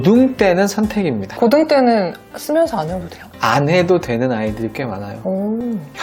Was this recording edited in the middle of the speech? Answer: no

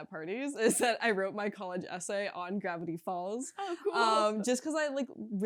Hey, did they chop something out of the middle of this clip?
no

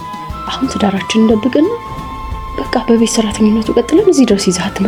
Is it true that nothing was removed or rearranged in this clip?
yes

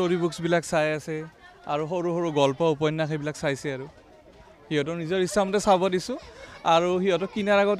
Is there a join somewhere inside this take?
no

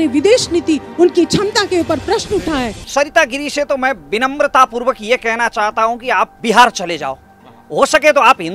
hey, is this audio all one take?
no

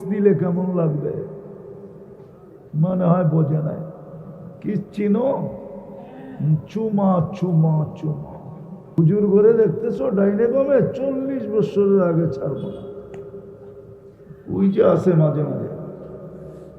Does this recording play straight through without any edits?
no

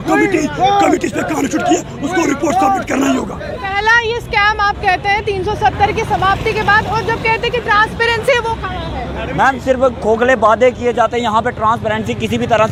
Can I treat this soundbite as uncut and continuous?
yes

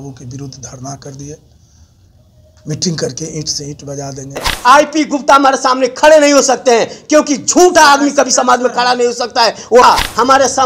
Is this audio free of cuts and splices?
no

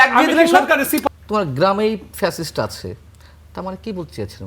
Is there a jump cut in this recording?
yes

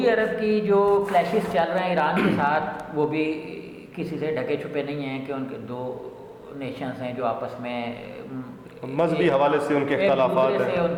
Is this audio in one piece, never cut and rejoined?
yes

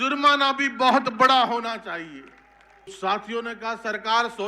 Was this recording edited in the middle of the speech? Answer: yes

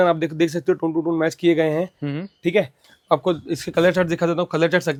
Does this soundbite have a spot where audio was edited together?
no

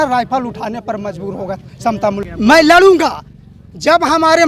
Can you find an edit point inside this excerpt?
yes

